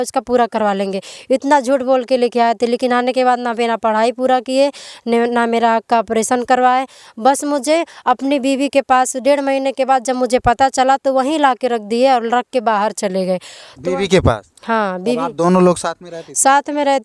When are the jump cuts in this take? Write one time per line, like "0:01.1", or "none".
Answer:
none